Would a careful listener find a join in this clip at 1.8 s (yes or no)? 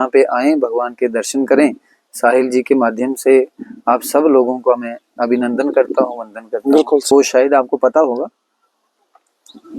no